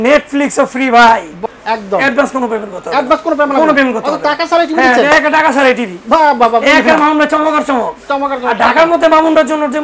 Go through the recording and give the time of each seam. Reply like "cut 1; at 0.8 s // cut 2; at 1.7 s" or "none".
cut 1; at 1.3 s